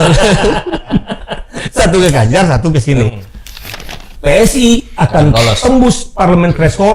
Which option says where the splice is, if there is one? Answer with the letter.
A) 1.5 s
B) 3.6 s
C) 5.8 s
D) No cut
B